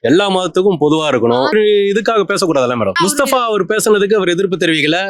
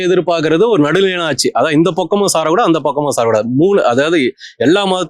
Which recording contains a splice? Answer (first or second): first